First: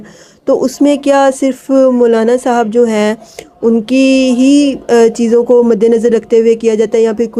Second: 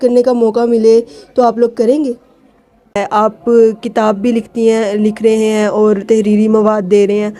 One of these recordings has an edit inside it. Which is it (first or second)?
second